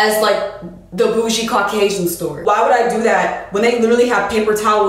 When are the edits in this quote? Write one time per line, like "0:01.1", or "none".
0:02.4